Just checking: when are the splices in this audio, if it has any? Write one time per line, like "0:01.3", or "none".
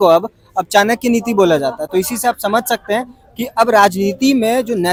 none